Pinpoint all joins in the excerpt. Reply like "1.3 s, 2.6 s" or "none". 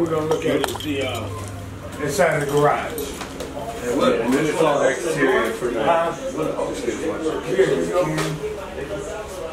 none